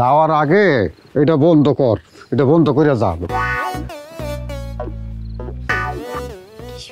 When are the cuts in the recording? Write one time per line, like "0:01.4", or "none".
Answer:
0:05.7